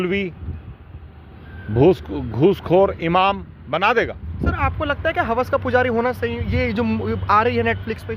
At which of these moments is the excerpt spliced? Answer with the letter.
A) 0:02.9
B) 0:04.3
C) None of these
B